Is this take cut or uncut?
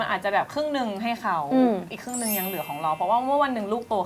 uncut